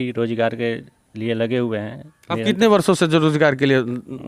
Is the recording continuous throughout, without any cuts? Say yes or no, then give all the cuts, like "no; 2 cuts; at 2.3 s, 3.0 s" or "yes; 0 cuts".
yes; 0 cuts